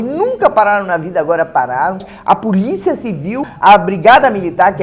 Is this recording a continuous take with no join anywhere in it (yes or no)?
no